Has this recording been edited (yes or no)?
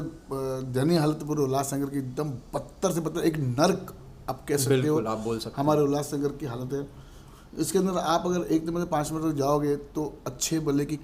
no